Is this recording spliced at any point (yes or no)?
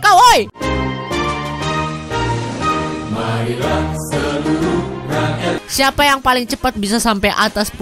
yes